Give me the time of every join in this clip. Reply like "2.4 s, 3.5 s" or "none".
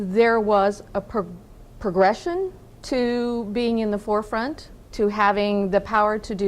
5.0 s